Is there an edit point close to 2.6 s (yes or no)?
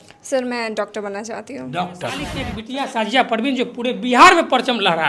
yes